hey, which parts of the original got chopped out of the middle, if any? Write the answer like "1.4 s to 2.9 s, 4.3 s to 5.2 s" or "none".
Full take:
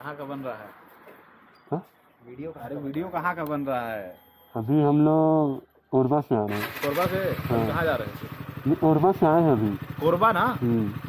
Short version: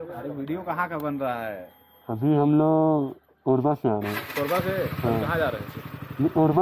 none